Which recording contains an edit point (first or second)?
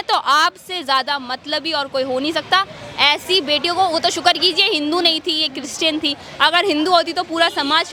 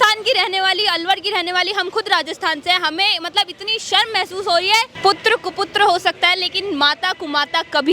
second